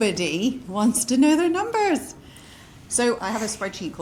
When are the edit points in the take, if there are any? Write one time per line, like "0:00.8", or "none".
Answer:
none